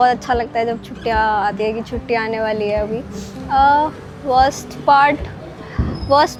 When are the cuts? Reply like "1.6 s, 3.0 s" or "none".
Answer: none